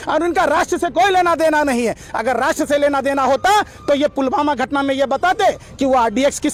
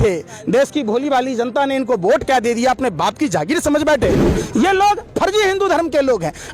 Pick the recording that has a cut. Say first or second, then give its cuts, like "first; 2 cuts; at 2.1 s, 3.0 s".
second; 1 cut; at 4.3 s